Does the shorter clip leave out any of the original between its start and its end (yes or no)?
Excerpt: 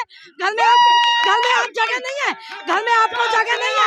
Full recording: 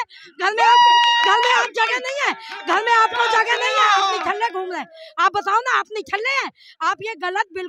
no